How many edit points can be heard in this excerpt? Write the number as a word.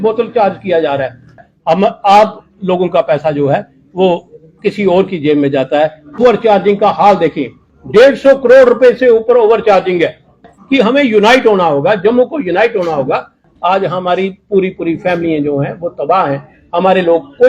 four